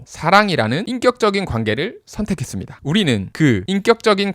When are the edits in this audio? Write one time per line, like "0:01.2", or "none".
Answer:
0:02.7

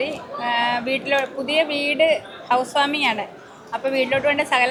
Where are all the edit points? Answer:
none

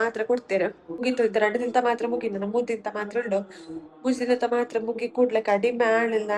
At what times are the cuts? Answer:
0:01.0

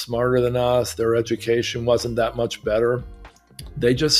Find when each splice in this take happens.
none

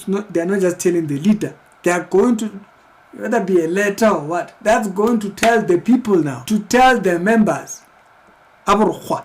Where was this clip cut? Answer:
0:06.4

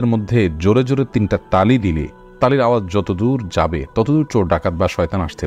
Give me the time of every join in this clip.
none

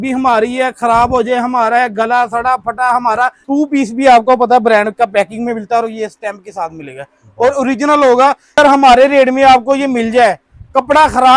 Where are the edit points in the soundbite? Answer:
0:03.4
0:08.6

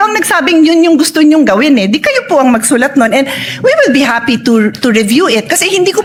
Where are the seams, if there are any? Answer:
none

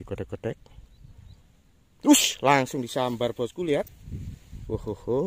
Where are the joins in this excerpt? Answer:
none

